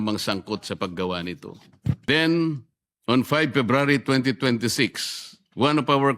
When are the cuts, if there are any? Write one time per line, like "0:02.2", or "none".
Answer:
0:02.0